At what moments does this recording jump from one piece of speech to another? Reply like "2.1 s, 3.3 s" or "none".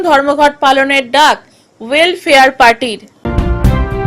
3.1 s